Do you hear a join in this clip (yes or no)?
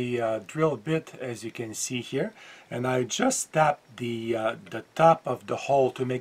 no